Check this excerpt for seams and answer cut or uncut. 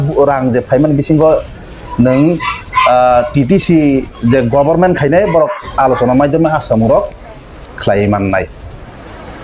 uncut